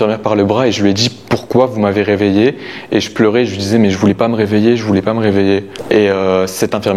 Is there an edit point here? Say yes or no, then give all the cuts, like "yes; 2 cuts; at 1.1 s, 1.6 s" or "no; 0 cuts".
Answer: no; 0 cuts